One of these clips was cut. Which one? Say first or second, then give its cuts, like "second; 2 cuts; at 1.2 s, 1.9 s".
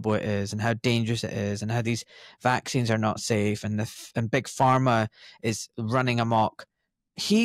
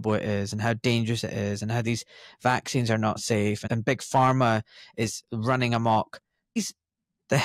second; 2 cuts; at 3.6 s, 6.6 s